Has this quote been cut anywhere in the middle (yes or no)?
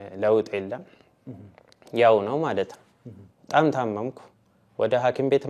no